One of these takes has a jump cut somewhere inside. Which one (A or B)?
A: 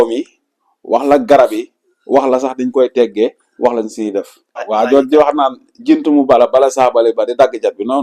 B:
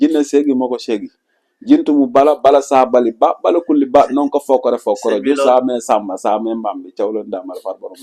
A